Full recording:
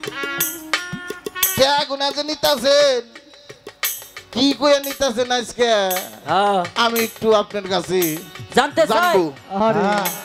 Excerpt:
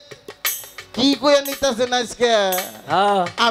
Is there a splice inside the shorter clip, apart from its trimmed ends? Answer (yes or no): no